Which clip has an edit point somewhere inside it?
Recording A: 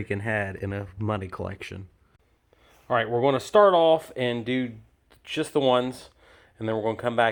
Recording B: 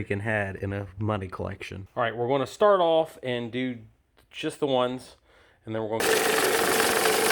B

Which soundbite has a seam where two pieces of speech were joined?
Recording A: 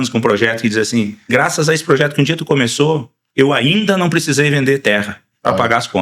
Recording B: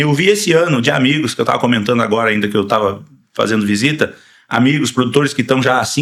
A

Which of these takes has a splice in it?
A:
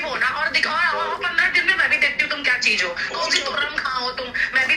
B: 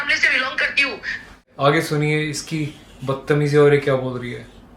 B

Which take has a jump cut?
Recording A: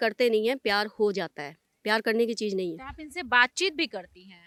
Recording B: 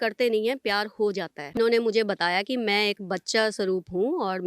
B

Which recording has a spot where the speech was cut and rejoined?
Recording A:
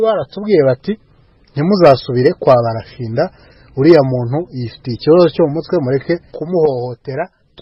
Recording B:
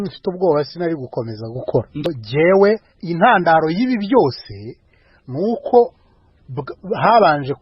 B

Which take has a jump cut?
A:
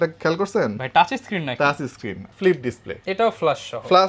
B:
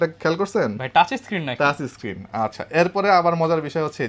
A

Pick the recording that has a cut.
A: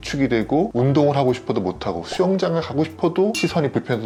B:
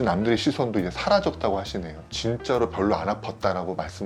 B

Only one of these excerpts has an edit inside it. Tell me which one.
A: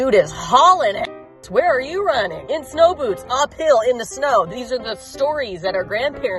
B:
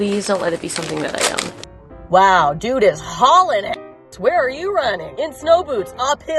B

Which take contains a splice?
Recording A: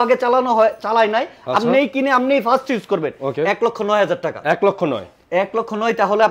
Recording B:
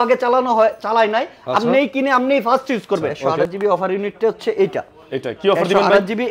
B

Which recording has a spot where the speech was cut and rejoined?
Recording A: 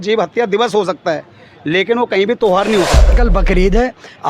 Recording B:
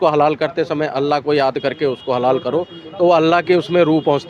A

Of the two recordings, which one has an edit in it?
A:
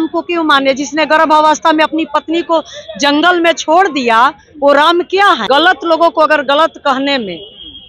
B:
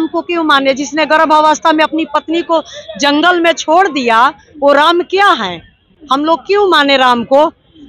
A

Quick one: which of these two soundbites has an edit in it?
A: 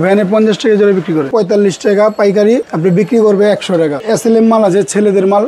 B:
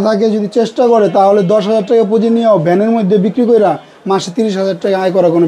A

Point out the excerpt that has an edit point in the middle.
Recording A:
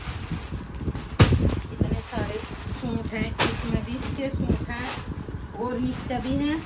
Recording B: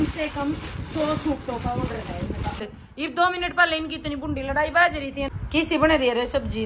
B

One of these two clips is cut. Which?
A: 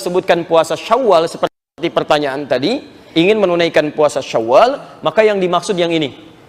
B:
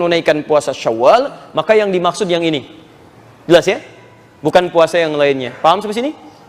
A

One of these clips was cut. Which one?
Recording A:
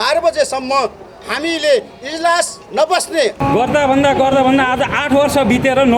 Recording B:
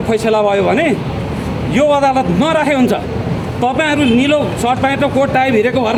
A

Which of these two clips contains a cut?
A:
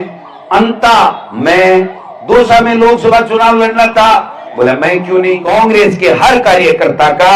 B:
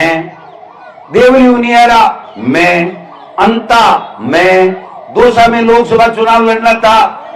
A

